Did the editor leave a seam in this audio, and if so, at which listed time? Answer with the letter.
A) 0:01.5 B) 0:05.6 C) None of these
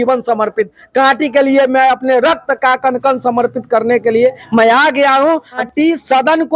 B